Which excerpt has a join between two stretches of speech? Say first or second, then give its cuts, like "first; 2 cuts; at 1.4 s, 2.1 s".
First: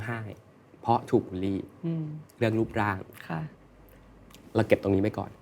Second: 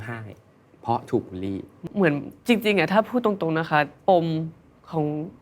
second; 1 cut; at 1.9 s